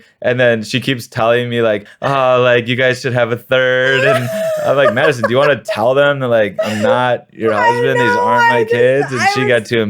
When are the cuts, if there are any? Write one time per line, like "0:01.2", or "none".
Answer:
0:01.9